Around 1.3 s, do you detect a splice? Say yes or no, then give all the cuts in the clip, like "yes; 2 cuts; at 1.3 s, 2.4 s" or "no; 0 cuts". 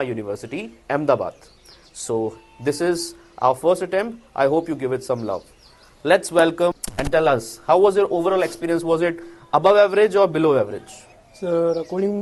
no; 0 cuts